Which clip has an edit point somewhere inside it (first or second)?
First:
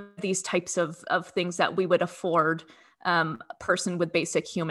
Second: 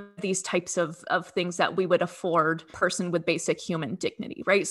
second